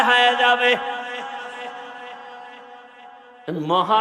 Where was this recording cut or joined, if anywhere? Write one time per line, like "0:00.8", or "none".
0:02.9